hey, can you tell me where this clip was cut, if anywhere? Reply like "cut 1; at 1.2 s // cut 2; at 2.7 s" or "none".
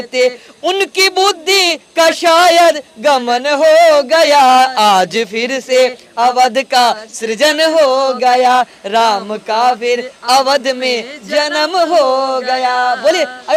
none